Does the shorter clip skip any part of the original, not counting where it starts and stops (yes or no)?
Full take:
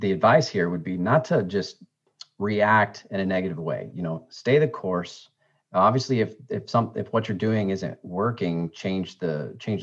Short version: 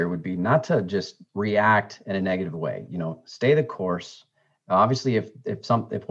yes